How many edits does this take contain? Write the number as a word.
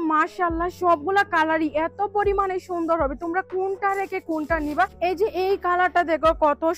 one